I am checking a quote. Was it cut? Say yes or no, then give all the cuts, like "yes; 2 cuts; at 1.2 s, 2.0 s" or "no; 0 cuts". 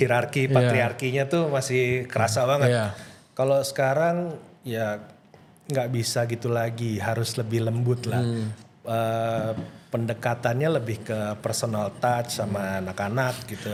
no; 0 cuts